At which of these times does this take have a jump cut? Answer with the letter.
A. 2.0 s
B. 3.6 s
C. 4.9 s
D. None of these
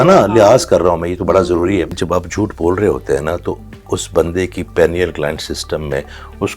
A